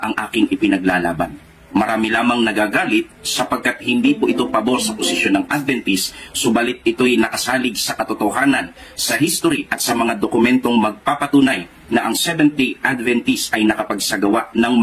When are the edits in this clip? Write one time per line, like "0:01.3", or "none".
0:08.8